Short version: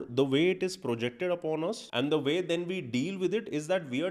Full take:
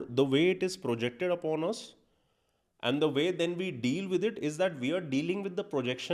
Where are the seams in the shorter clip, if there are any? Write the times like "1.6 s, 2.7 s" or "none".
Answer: 1.8 s